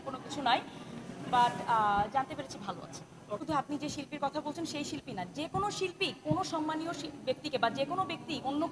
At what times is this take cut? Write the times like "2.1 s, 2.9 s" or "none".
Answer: 3.4 s